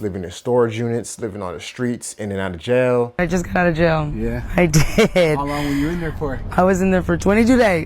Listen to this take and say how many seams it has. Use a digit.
1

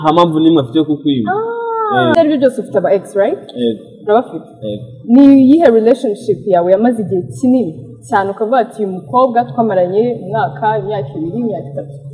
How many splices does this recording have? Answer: 1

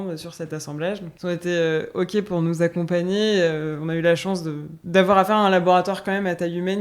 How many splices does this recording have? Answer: 2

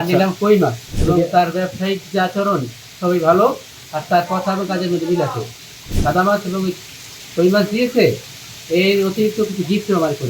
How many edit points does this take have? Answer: 2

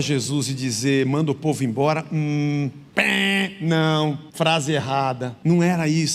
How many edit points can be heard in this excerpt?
3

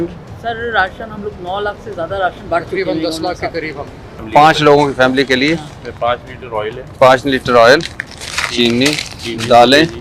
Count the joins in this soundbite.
1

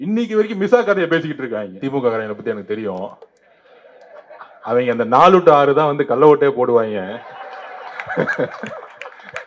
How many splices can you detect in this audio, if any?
1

